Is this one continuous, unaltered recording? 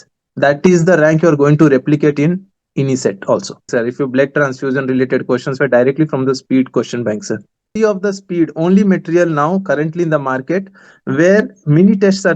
no; 2 cuts; at 3.7 s, 7.7 s

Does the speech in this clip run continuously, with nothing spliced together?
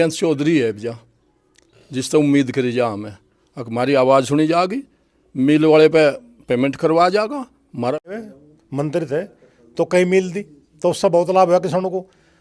no; 1 cut; at 8.1 s

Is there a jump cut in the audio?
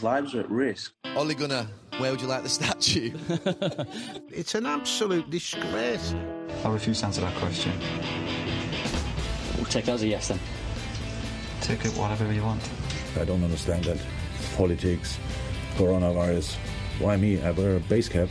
no; 0 cuts

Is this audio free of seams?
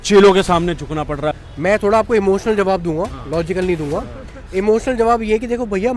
no; 1 cut; at 1.4 s

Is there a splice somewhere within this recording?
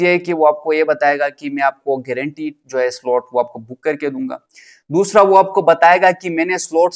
no; 0 cuts

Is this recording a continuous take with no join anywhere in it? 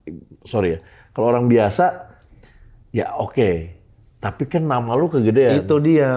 yes; 0 cuts

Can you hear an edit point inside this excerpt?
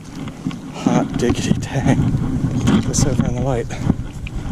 yes; 1 cut; at 2.6 s

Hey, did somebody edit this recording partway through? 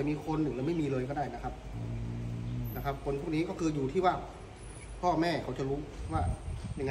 no; 0 cuts

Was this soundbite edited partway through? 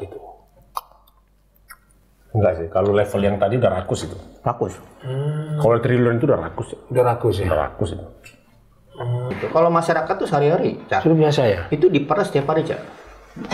yes; 1 cut; at 9.4 s

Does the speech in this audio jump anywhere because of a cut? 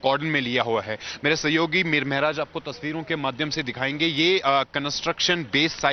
no; 0 cuts

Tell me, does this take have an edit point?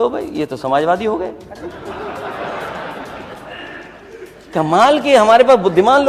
no; 0 cuts

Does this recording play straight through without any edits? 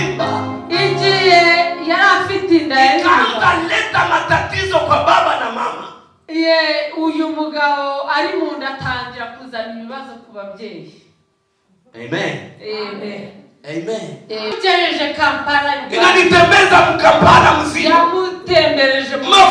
no; 1 cut; at 14.6 s

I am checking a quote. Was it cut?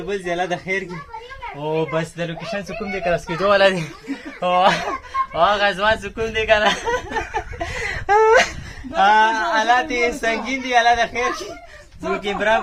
no; 0 cuts

